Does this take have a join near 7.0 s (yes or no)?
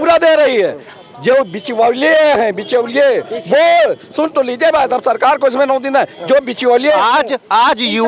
yes